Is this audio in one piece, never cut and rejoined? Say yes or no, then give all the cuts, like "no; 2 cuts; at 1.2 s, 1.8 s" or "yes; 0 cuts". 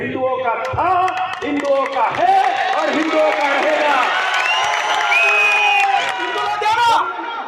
no; 1 cut; at 6.5 s